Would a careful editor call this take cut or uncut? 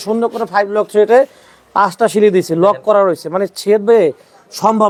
uncut